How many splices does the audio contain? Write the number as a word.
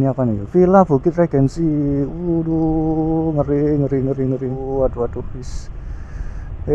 one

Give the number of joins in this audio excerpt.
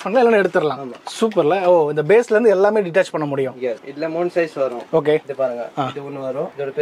zero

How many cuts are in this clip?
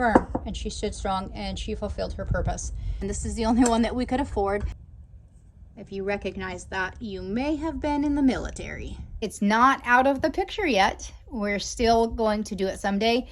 three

